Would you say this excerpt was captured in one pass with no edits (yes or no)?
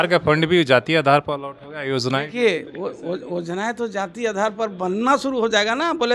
yes